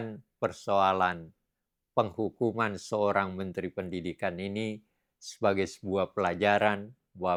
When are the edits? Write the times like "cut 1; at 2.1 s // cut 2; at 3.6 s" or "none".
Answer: none